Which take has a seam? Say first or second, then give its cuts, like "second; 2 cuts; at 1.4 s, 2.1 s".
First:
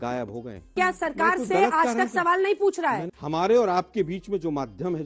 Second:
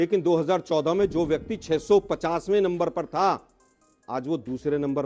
first; 2 cuts; at 0.7 s, 3.1 s